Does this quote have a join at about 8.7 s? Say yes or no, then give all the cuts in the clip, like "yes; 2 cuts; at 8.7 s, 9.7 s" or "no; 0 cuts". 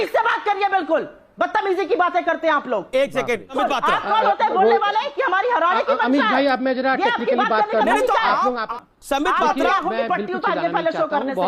yes; 2 cuts; at 3.6 s, 8.7 s